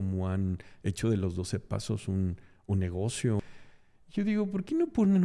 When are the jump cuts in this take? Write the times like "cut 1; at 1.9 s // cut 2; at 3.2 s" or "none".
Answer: cut 1; at 3.4 s